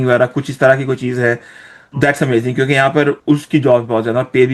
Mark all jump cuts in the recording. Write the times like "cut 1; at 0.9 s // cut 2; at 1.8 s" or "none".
none